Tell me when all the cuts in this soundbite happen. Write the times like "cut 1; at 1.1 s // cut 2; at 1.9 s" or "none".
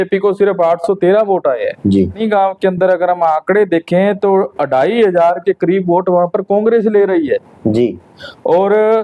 cut 1; at 2.2 s